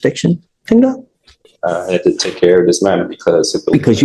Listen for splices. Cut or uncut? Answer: uncut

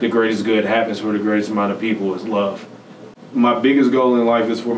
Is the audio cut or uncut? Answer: cut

